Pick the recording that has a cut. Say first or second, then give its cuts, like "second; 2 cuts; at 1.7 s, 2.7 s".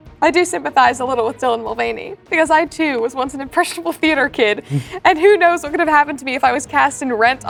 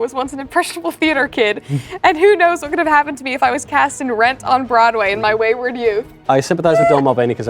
second; 1 cut; at 6.1 s